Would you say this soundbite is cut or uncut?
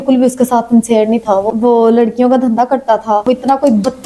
cut